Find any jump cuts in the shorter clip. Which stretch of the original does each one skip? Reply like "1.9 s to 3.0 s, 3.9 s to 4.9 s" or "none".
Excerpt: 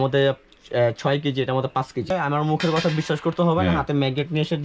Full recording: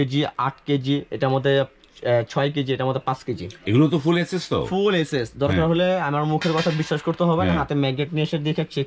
3.4 s to 5.9 s